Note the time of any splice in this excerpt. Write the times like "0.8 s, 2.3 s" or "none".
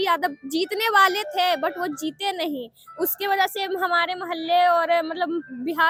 none